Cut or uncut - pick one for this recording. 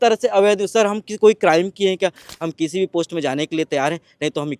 cut